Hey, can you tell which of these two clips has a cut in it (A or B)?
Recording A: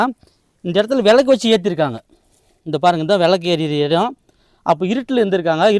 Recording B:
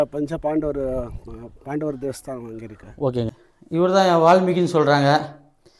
B